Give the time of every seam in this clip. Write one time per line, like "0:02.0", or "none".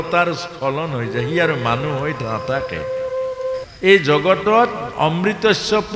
0:03.7